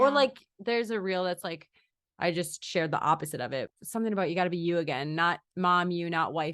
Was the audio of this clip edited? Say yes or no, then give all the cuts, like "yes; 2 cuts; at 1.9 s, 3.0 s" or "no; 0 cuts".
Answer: yes; 1 cut; at 3.7 s